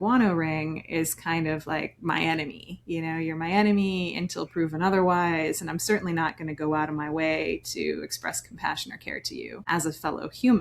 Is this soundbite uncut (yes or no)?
no